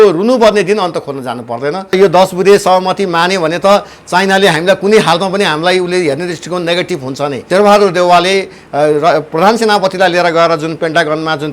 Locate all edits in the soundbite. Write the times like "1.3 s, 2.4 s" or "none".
1.9 s, 7.4 s